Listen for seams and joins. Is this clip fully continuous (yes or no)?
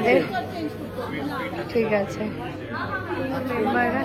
yes